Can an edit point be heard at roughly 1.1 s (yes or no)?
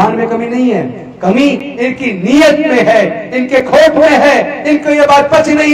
no